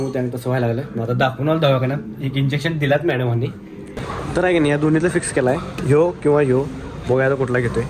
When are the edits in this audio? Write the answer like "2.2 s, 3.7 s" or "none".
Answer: 3.9 s